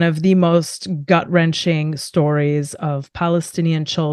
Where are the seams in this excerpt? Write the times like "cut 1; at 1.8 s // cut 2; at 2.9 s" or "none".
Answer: none